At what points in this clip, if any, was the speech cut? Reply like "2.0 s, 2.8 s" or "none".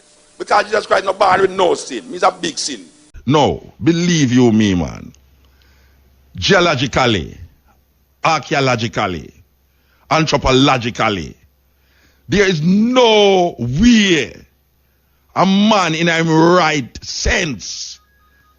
3.1 s